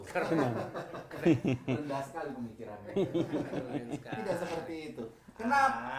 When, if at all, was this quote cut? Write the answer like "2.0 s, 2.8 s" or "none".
none